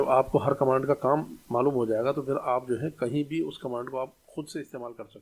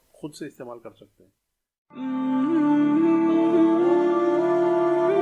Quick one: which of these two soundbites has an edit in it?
second; 1 cut; at 2.0 s

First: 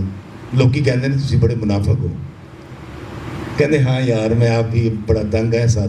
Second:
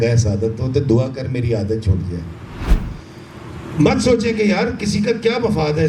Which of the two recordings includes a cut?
second; 1 cut; at 2.9 s

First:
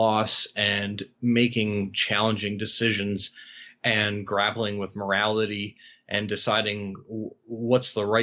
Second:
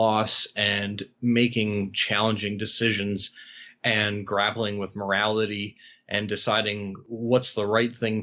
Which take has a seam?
second; 1 cut; at 7.0 s

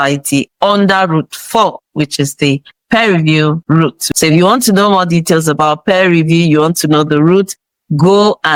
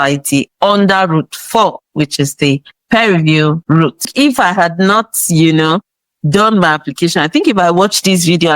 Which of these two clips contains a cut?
second; 1 cut; at 4.1 s

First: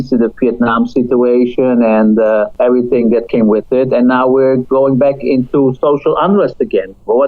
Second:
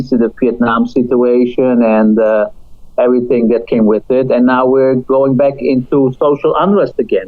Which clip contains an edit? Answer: first; 1 cut; at 2.5 s

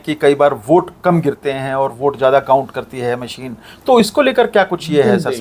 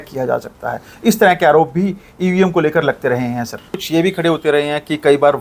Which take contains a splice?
second; 1 cut; at 3.8 s

